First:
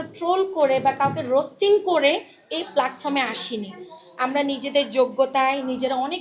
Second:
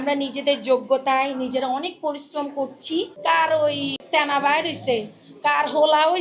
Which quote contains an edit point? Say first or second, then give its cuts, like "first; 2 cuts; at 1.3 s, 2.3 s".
second; 2 cuts; at 3.1 s, 4.0 s